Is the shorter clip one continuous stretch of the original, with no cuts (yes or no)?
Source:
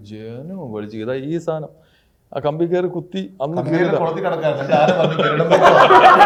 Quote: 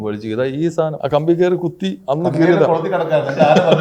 no